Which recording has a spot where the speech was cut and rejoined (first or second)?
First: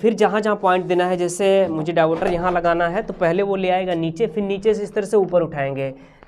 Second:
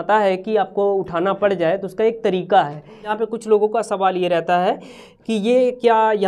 second